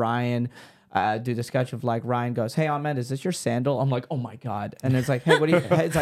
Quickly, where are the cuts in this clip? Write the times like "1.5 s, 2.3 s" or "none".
none